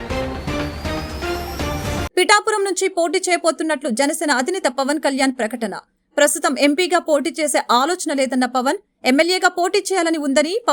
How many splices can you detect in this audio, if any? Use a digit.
1